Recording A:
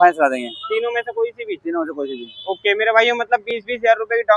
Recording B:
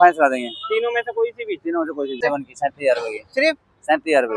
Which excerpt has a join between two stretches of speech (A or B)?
B